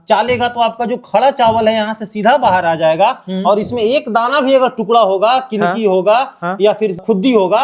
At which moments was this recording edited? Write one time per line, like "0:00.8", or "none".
none